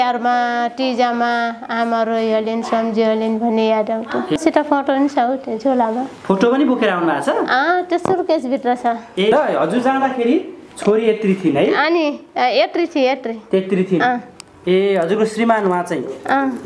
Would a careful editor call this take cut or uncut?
cut